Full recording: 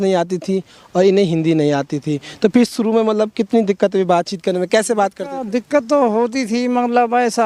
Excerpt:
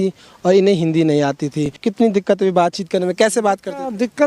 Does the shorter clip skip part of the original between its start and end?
yes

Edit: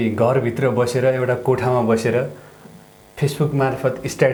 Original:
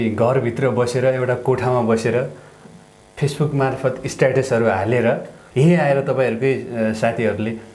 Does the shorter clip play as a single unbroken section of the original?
yes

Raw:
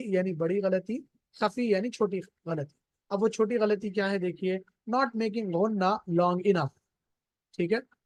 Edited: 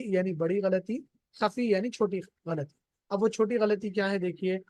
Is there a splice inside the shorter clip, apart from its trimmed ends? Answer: no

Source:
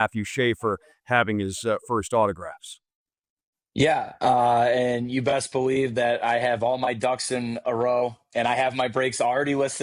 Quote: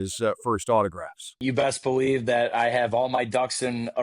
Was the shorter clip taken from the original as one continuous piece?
no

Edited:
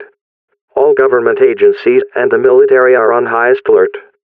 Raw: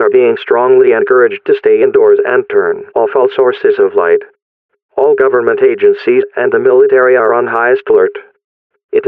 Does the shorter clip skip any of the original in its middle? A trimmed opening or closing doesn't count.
no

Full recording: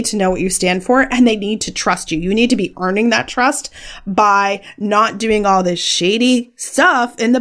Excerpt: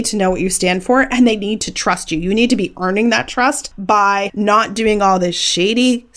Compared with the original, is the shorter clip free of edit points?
no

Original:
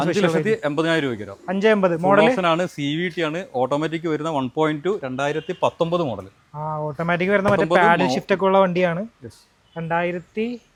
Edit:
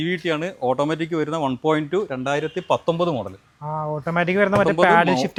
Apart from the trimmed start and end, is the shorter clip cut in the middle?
no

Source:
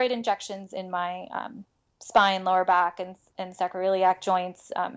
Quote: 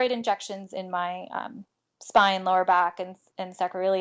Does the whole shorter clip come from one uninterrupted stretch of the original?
yes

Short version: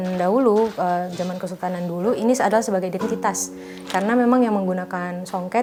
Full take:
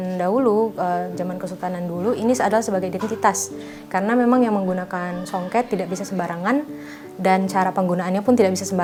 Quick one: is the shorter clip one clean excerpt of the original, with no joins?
yes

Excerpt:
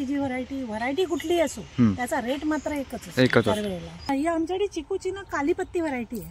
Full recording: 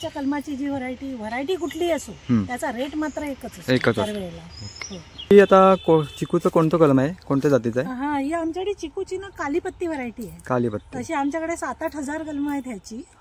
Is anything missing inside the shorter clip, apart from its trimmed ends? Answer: yes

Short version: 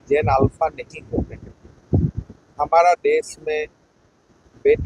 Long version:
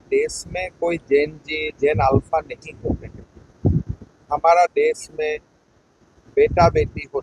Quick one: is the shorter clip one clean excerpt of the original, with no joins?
yes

